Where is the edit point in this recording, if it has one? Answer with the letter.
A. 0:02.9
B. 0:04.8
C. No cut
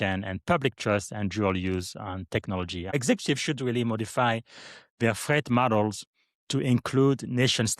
A